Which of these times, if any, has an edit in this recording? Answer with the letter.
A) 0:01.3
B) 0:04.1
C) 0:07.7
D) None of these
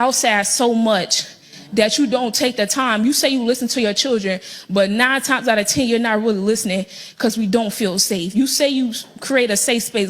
C